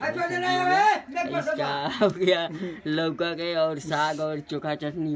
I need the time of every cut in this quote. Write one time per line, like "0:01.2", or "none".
none